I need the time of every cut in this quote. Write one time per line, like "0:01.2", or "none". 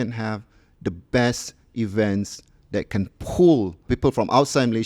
0:03.9